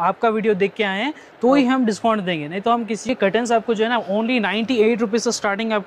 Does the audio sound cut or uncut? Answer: cut